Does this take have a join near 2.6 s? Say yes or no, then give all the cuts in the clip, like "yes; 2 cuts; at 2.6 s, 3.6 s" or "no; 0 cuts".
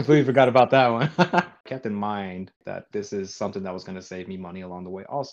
yes; 2 cuts; at 1.7 s, 2.6 s